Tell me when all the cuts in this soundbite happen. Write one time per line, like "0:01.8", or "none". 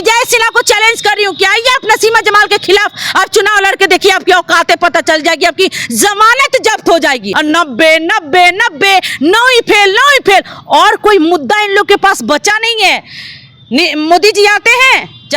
0:07.3

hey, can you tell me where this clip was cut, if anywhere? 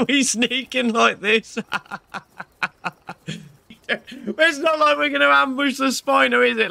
0:03.8

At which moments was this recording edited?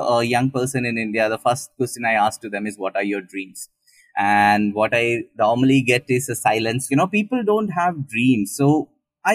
0:06.9

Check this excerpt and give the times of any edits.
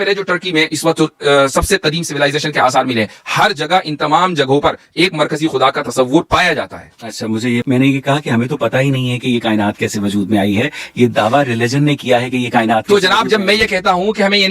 0:07.6

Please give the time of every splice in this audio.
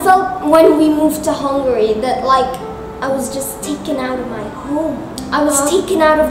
none

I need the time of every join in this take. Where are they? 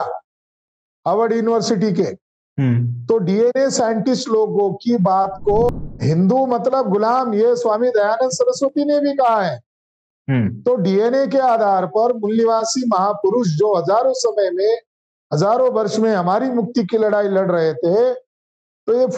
0:05.7

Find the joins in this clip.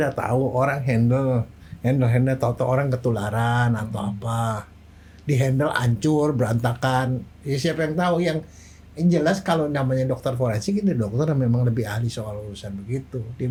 none

